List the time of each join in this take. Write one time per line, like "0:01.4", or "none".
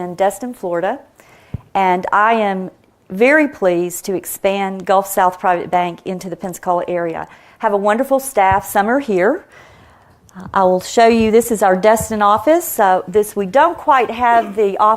0:02.9